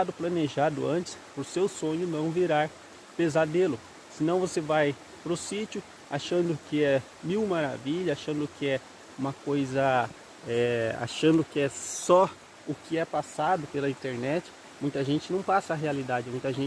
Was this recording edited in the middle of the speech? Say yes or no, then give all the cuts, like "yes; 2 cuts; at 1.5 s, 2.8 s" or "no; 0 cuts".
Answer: no; 0 cuts